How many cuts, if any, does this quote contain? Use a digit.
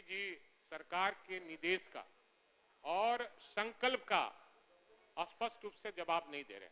0